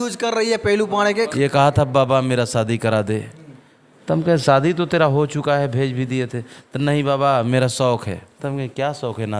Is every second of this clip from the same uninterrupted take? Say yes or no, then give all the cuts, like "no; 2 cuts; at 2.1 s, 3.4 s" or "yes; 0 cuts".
no; 1 cut; at 1.3 s